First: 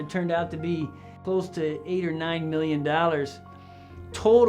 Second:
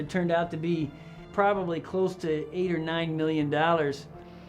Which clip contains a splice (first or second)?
first